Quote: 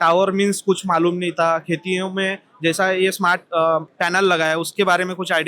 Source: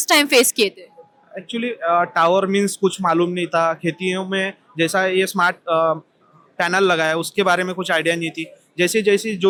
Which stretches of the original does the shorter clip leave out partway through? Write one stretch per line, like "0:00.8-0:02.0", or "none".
0:06.1-0:06.5

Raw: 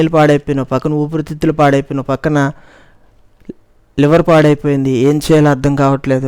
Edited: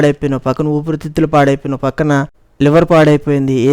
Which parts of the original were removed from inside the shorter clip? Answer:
0:02.7-0:03.8

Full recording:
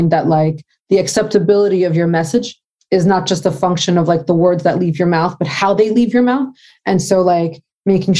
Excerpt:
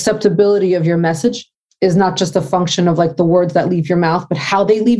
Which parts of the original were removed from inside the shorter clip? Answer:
none

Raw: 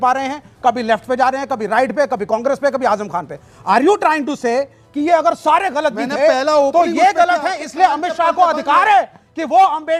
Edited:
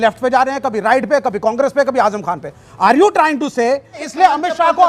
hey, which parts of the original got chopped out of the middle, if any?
0:04.8-0:07.6

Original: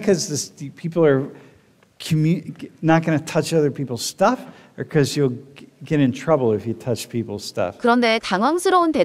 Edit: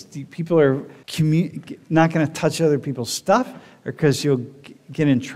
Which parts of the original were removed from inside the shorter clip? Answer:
0:01.4-0:01.9

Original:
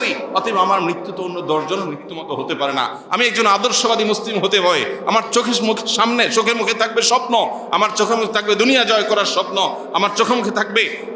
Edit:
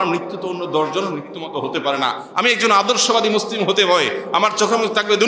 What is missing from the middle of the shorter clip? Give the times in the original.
0:05.0-0:07.6

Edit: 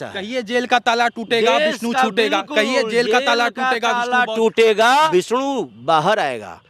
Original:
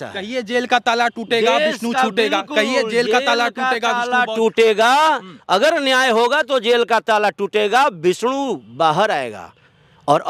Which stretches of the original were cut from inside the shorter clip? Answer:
0:05.1-0:08.0

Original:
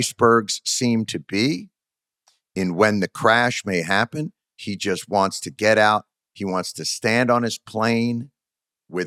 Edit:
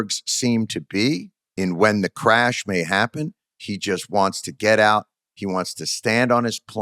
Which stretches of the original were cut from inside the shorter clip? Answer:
0:01.8-0:02.4

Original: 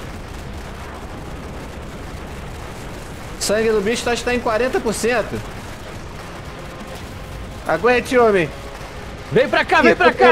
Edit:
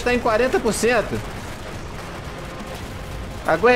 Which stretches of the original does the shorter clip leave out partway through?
none

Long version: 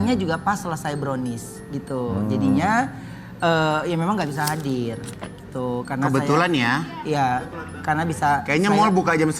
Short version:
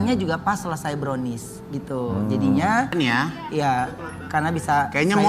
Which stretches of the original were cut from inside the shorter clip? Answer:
0:02.9-0:06.5

